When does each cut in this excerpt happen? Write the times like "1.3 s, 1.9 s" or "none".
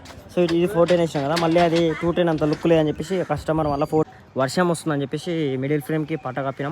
4.1 s